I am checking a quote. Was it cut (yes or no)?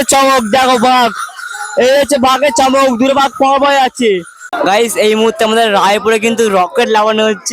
yes